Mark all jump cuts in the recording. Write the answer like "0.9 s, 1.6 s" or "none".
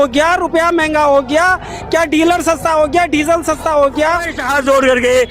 4.4 s